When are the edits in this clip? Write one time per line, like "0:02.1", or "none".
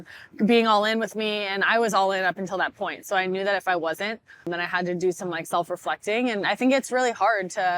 0:04.5